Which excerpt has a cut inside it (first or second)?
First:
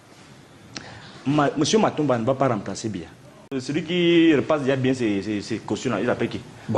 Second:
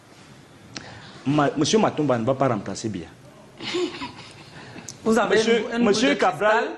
first